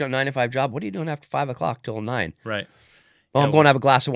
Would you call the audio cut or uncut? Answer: uncut